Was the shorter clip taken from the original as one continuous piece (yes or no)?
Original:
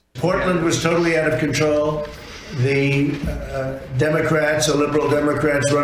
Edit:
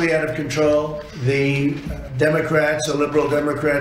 no